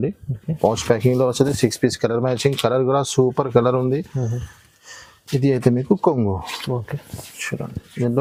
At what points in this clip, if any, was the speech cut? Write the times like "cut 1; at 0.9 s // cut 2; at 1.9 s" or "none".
none